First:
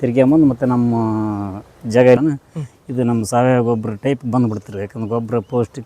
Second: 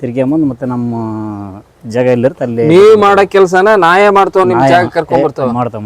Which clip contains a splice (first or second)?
first